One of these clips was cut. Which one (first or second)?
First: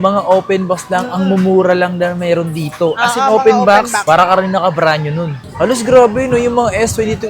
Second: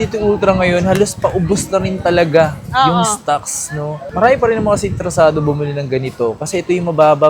first